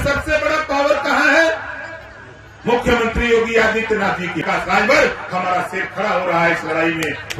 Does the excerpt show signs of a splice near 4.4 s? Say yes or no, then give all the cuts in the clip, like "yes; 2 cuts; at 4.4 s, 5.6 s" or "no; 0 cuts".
yes; 1 cut; at 4.4 s